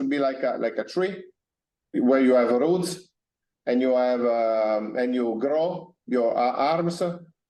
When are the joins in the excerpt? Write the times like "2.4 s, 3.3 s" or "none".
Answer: 1.9 s